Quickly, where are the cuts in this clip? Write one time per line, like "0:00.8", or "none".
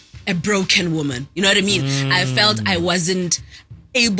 none